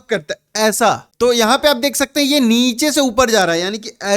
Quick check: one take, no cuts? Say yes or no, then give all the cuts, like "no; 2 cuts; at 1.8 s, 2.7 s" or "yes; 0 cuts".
no; 1 cut; at 1.1 s